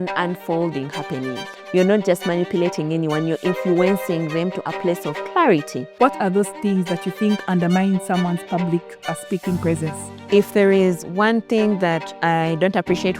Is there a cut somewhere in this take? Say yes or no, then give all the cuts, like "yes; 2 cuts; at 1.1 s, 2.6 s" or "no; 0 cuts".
yes; 3 cuts; at 1.5 s, 5.9 s, 10.1 s